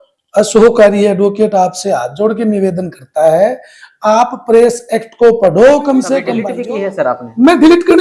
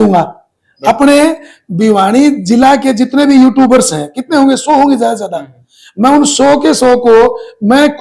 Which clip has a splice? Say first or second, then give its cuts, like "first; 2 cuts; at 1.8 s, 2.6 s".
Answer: first; 1 cut; at 6.4 s